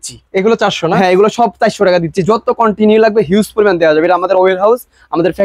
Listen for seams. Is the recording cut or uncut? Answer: uncut